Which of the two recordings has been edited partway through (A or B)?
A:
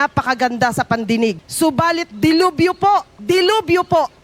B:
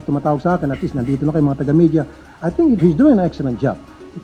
A